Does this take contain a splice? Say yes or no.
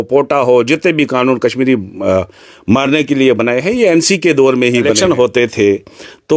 yes